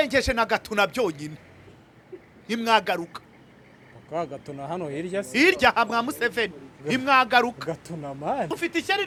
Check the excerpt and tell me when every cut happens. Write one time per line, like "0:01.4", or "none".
none